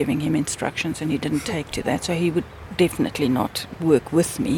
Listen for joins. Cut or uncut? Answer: cut